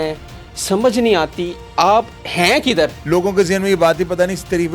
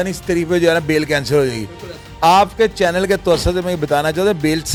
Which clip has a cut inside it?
first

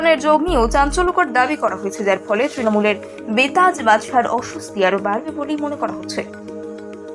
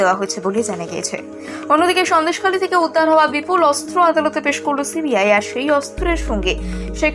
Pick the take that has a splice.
first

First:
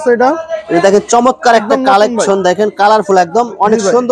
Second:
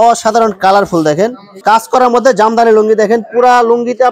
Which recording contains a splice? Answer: second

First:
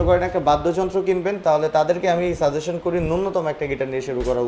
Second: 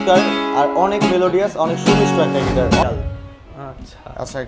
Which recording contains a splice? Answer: second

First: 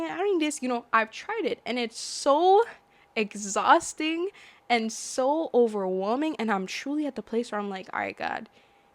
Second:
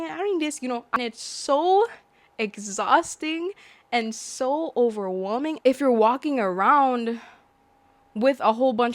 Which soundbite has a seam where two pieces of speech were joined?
second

